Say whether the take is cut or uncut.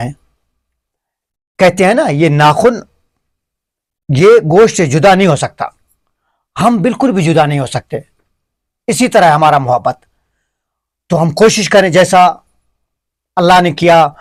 uncut